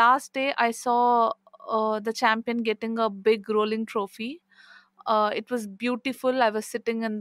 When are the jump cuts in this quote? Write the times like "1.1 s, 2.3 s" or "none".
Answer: none